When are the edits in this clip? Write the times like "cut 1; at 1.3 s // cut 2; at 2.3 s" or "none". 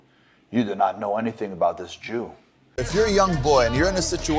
cut 1; at 2.6 s